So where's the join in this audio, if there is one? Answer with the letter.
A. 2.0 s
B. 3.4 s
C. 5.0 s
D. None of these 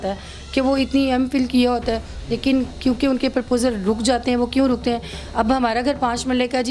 D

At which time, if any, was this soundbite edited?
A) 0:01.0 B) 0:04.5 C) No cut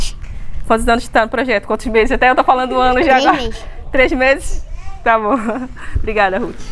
C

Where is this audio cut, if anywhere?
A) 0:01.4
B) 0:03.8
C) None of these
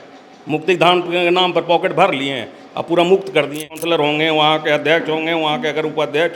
B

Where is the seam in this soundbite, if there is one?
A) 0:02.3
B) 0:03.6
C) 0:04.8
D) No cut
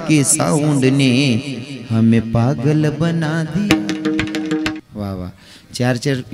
C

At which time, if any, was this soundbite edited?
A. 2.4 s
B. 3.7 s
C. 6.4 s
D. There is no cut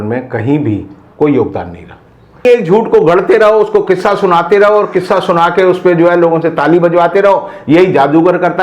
A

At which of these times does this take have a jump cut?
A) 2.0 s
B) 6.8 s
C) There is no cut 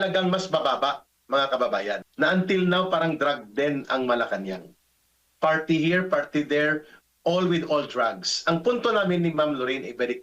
A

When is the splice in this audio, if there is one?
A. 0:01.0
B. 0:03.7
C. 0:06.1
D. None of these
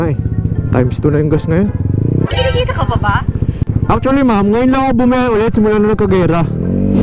D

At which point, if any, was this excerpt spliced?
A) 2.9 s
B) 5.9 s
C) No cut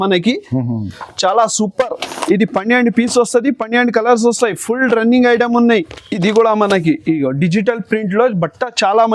B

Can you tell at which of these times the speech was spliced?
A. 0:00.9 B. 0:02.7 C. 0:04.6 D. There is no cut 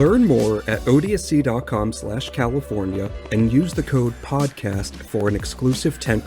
D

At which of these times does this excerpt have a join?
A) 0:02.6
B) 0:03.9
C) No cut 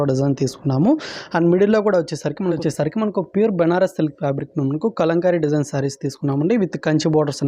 A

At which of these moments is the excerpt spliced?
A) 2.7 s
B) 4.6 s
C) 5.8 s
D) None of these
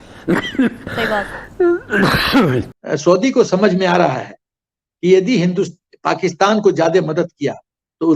A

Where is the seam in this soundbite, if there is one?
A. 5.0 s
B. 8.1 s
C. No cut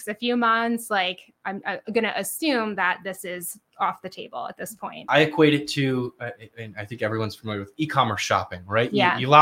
A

